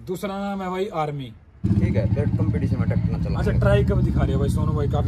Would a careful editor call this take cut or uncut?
cut